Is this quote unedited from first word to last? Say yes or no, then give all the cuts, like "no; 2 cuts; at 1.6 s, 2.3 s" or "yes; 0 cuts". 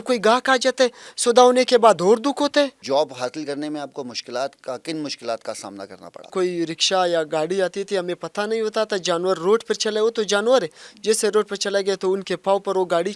no; 2 cuts; at 2.8 s, 6.3 s